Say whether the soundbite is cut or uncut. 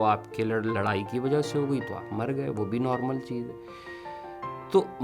uncut